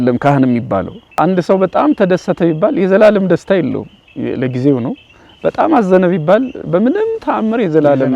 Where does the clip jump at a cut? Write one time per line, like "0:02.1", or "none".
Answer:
0:01.1